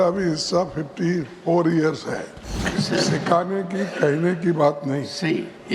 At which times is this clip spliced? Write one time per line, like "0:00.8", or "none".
0:02.7